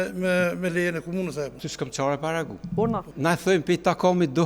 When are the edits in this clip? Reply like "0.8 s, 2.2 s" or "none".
1.6 s, 3.1 s